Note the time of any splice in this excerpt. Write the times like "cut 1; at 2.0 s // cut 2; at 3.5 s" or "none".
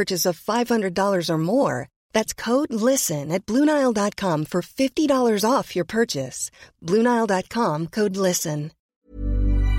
cut 1; at 8.8 s